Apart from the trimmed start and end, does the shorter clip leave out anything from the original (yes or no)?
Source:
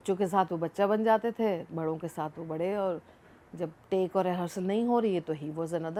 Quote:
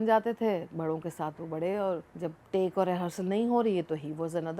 yes